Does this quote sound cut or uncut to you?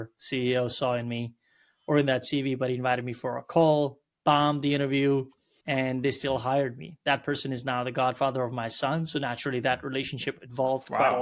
uncut